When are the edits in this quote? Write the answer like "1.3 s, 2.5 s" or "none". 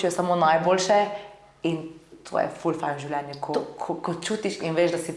none